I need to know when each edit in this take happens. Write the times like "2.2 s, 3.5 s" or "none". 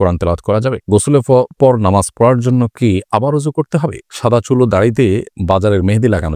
0.9 s, 4.0 s, 5.3 s